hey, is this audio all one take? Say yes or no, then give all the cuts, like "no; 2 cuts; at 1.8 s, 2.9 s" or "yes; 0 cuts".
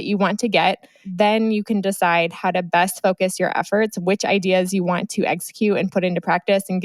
no; 1 cut; at 1.0 s